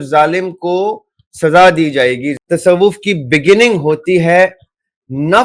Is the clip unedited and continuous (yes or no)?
no